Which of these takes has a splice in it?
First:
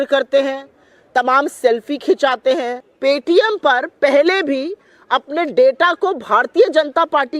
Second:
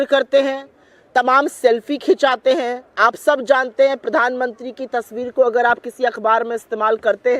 first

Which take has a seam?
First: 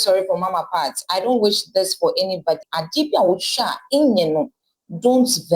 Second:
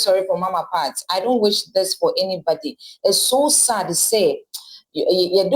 first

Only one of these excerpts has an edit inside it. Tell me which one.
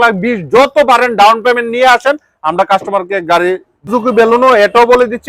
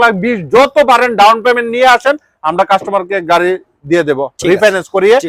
first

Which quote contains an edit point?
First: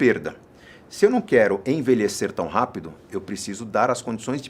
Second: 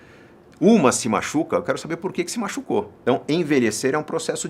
second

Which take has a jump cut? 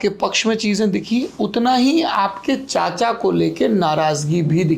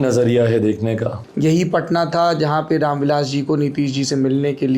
second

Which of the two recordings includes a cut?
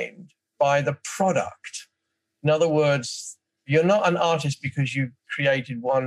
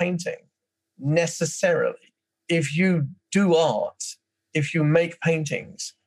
second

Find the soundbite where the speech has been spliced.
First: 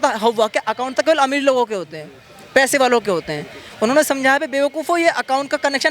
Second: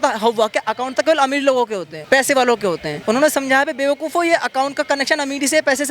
second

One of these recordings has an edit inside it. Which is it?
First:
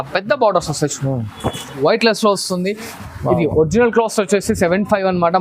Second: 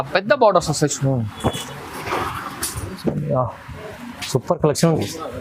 first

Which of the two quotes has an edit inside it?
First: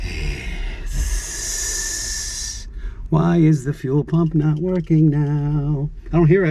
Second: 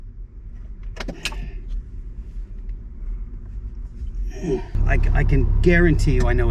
second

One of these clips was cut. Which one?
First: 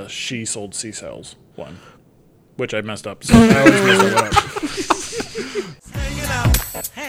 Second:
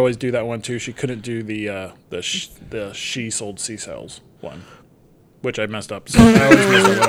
first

